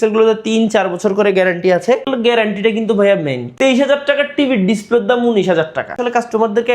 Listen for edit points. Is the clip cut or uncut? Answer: cut